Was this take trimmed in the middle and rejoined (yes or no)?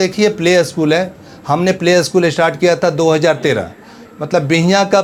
no